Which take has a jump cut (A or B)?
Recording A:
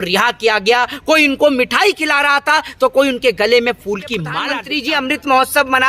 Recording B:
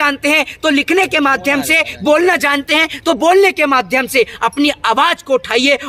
A